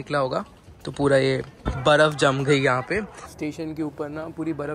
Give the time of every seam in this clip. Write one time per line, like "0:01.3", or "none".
0:01.5
0:03.2